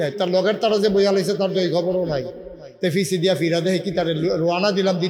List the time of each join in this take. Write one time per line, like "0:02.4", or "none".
none